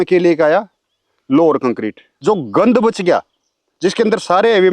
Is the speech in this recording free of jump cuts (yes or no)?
no